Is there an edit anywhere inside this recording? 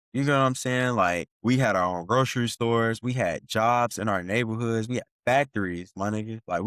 yes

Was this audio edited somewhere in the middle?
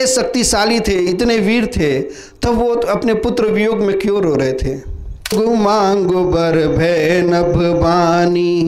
yes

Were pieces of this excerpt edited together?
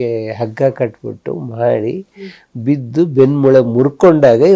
no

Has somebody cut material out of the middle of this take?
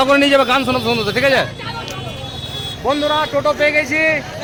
no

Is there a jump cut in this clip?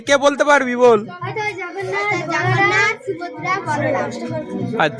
no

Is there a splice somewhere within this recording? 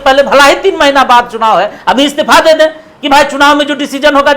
no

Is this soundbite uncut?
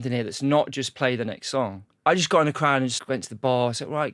no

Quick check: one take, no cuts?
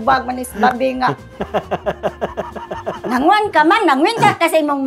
yes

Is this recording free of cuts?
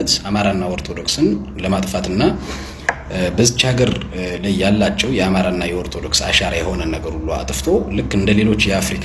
yes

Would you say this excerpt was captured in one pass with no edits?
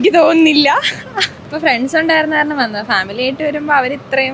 no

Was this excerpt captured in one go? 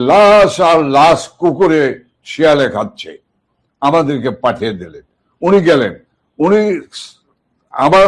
yes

